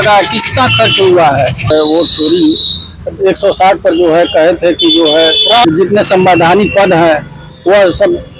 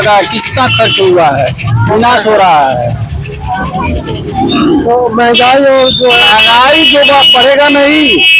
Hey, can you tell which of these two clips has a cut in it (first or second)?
first